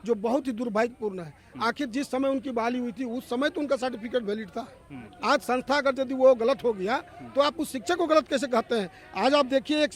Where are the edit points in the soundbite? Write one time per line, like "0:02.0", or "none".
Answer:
none